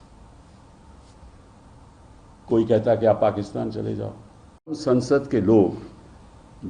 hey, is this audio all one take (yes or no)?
no